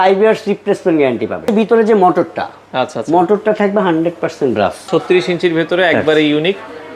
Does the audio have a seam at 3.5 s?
no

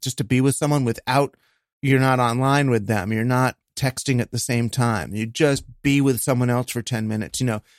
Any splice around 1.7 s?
yes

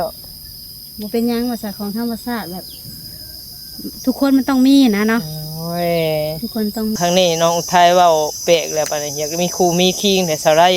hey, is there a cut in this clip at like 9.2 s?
no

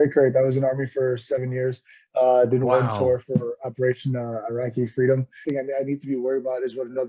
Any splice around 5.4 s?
yes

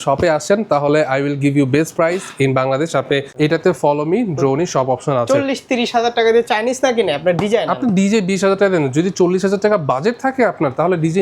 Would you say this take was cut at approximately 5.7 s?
no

